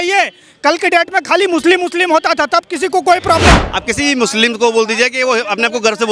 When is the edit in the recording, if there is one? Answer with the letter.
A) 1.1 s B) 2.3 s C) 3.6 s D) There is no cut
C